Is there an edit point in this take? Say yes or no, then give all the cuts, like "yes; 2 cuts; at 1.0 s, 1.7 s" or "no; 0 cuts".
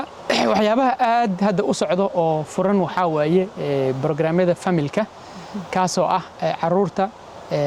no; 0 cuts